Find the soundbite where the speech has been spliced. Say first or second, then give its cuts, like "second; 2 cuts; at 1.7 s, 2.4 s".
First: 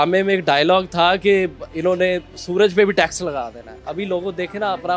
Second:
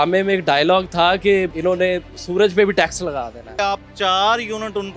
second; 2 cuts; at 1.5 s, 3.4 s